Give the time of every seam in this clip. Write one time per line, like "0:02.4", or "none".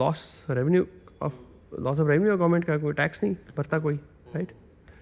none

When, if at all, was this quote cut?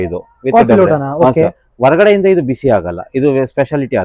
none

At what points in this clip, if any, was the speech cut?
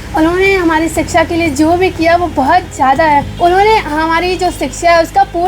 0:03.3

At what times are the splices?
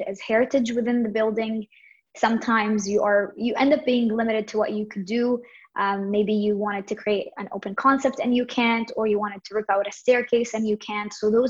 none

